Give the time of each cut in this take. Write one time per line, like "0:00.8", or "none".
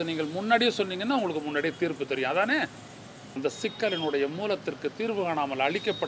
0:03.4

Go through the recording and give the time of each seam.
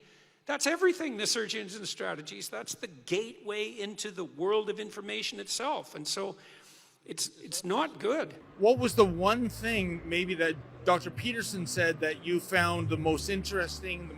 0:08.4

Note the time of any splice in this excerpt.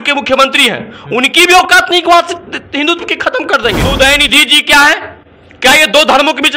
0:03.8

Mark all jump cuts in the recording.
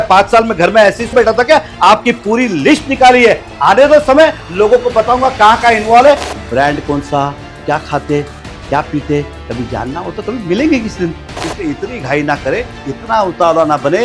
0:01.1
0:06.2
0:11.4

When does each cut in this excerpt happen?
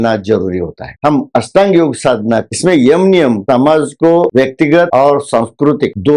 0:00.9
0:02.5

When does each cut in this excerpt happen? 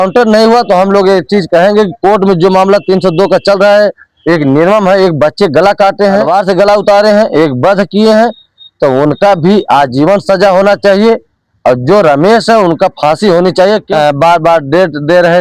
0:06.3
0:13.8

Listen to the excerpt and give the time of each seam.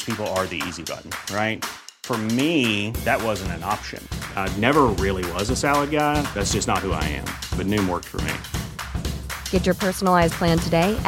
none

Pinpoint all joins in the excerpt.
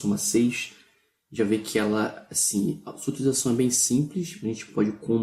0:02.1

